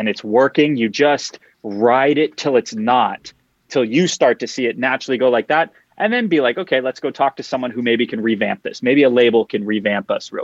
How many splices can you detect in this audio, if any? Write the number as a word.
zero